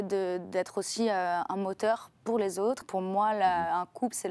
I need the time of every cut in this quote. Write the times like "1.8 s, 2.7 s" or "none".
2.8 s